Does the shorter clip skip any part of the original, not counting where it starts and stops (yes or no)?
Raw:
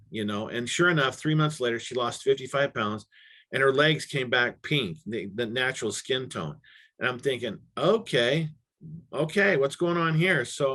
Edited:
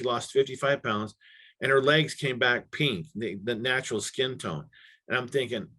no